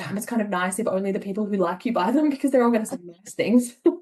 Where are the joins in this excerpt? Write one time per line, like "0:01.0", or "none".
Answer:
none